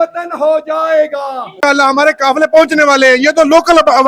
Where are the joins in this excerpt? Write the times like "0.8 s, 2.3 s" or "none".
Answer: 1.6 s